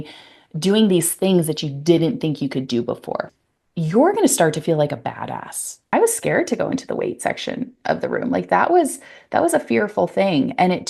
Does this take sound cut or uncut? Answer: cut